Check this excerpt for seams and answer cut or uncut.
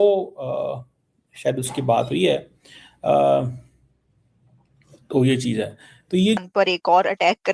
cut